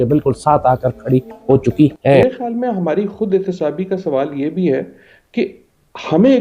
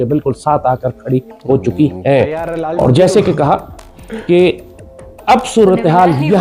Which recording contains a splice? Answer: first; 1 cut; at 2.2 s

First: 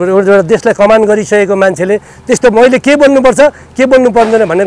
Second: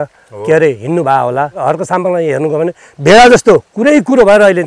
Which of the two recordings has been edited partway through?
second; 1 cut; at 1.6 s

